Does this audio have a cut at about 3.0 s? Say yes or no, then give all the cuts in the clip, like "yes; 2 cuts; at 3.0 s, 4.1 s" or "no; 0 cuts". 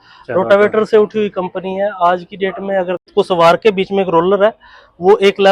yes; 1 cut; at 3.0 s